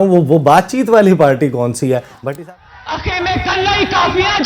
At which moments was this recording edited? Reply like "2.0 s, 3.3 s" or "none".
2.1 s

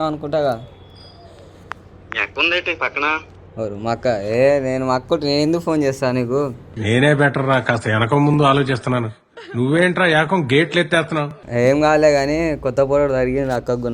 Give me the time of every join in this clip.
11.4 s

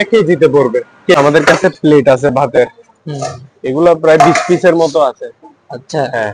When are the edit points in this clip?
1.1 s

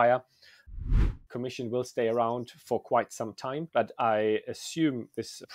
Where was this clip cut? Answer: 1.0 s, 3.7 s

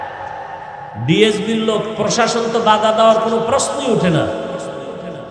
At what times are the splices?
0.9 s

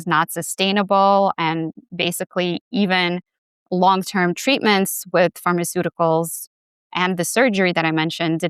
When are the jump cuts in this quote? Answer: none

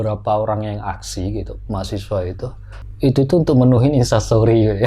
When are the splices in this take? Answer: none

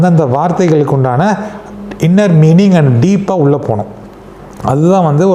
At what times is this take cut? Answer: none

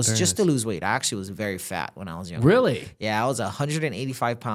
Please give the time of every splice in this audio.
none

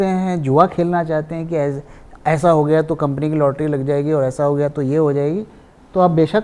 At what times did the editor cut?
none

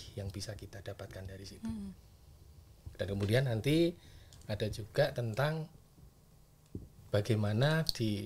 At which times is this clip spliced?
none

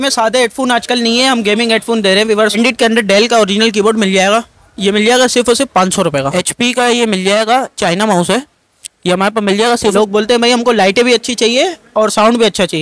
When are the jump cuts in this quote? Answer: 2.6 s, 6.3 s, 9.9 s

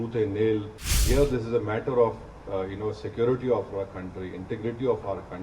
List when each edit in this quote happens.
1.0 s

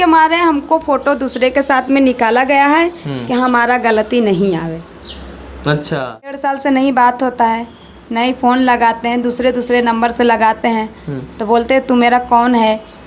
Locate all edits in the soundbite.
6.4 s

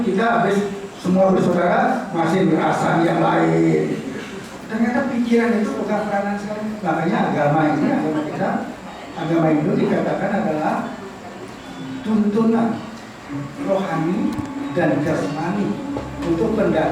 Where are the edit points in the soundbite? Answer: 4.4 s

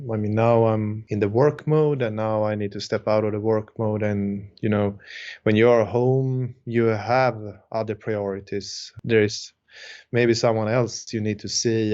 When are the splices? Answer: 1.0 s, 9.0 s

